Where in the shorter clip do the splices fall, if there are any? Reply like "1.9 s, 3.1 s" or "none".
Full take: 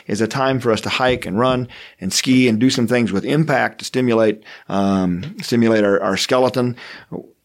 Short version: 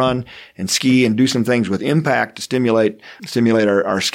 3.1 s